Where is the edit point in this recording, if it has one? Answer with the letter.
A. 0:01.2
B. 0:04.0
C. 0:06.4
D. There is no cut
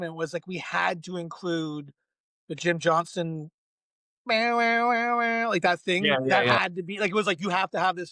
D